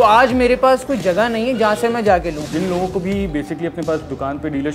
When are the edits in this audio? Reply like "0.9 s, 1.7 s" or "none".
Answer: 2.4 s